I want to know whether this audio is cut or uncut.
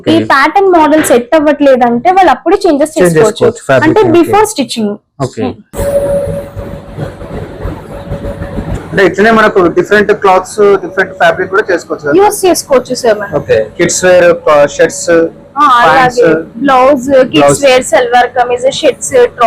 cut